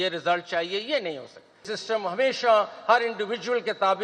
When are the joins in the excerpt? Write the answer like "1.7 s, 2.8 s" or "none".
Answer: 1.7 s